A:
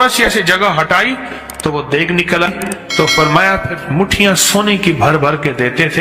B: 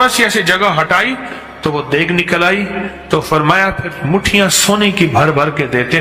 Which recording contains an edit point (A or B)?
A